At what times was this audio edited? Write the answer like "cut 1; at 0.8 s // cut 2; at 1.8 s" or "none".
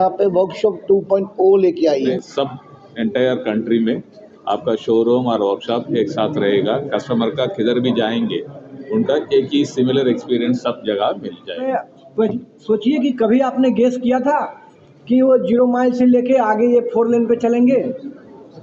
cut 1; at 2.1 s // cut 2; at 11.6 s